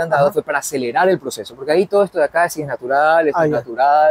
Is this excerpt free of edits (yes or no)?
yes